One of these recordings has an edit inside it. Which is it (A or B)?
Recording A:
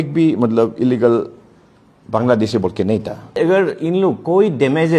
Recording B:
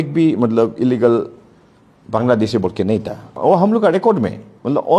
A